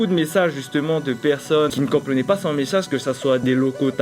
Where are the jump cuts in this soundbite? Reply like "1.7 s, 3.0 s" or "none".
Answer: none